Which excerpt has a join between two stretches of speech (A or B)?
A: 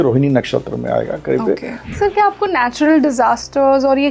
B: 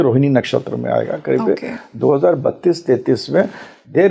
A